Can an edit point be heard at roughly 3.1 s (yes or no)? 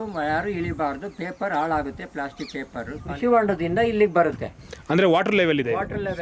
yes